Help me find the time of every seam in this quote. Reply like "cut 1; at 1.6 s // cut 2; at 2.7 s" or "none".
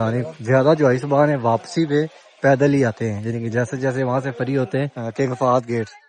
cut 1; at 5.0 s